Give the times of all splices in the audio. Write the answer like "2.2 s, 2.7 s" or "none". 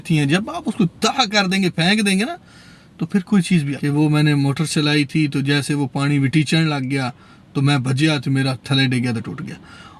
3.7 s